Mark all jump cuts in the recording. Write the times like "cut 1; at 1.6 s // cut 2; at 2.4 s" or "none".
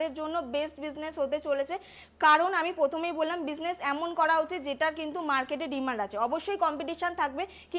none